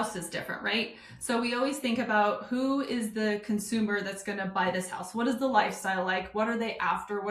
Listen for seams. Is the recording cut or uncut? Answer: uncut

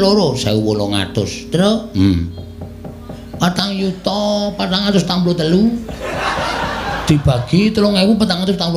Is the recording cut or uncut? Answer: uncut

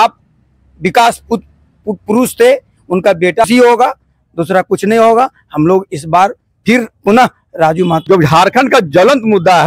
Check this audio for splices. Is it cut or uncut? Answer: cut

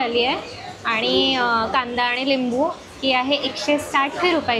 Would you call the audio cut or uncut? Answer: uncut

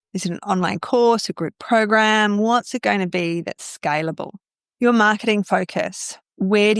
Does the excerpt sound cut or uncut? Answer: uncut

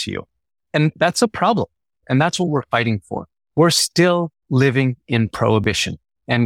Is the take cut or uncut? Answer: cut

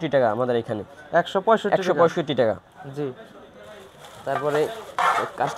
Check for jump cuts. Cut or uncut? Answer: uncut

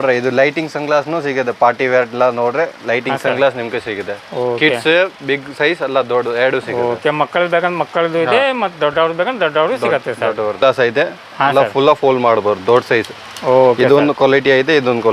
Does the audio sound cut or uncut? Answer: cut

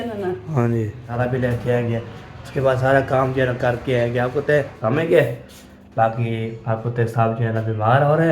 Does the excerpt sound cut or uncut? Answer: cut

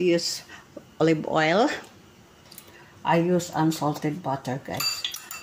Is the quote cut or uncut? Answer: cut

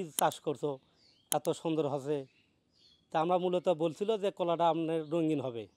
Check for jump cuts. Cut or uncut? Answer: uncut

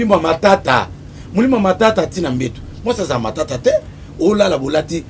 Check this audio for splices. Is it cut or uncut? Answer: uncut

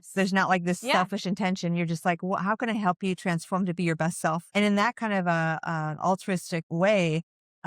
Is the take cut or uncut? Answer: cut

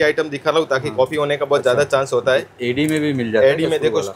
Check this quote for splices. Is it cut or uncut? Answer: uncut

